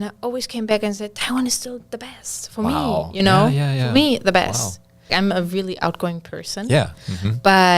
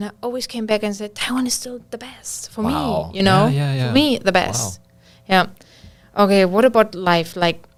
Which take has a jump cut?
first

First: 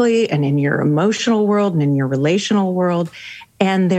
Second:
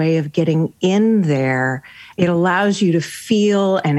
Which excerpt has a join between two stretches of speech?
second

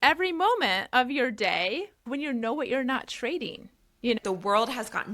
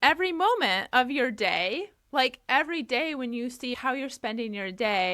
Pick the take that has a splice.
first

